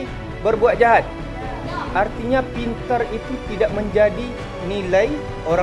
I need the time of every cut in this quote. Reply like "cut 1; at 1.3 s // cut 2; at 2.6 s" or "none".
cut 1; at 4.6 s